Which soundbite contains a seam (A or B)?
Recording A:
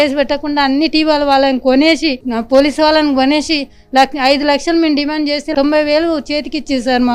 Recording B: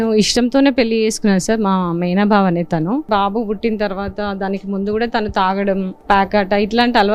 B